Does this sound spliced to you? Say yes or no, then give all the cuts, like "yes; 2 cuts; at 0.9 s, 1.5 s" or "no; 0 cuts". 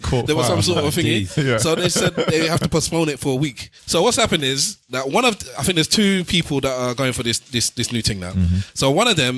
yes; 1 cut; at 3.7 s